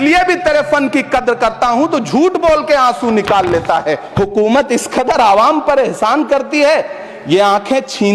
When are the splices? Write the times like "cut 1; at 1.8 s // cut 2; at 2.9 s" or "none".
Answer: cut 1; at 4.0 s

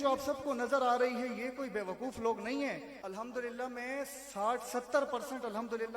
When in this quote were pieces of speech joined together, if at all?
cut 1; at 2.9 s

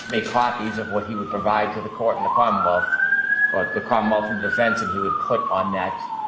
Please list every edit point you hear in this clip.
none

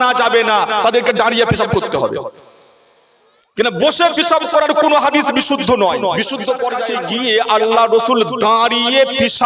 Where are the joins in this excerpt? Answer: cut 1; at 7.0 s

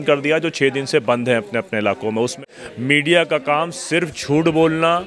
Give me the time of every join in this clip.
cut 1; at 2.4 s

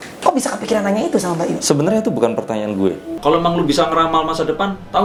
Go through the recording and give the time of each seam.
none

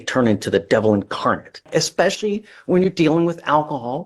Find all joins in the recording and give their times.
cut 1; at 1.7 s

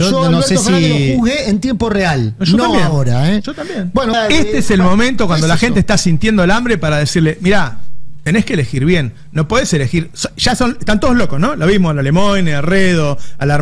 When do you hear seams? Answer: cut 1; at 4.1 s

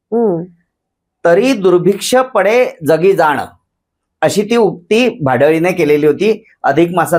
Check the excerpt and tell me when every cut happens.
none

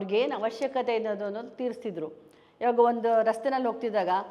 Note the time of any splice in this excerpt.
none

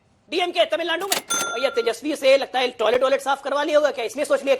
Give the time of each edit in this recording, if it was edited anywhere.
cut 1; at 1.0 s

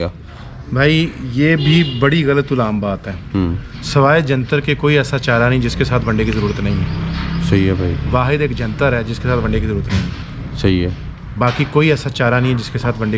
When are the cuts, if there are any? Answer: none

